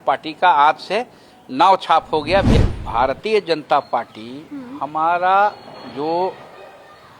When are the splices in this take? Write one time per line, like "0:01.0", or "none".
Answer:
0:02.5